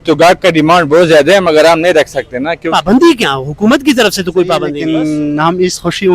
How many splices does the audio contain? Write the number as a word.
one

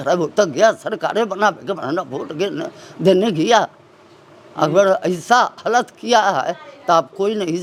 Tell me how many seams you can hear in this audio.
zero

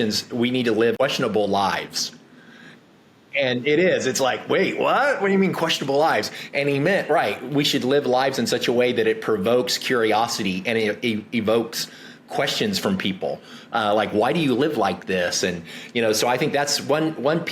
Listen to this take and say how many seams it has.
one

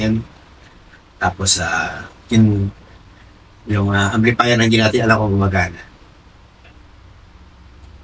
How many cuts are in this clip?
zero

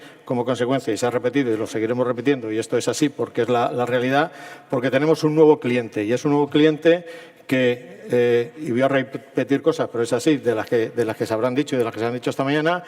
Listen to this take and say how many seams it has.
one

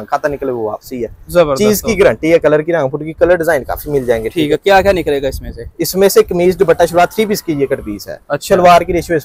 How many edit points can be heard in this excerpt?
zero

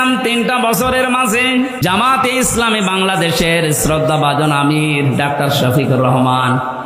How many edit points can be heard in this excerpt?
one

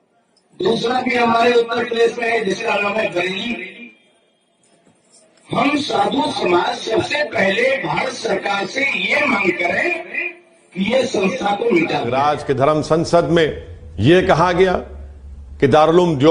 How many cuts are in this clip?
one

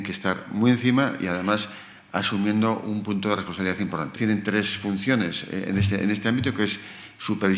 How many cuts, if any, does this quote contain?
one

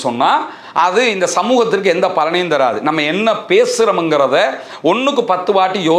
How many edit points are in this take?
zero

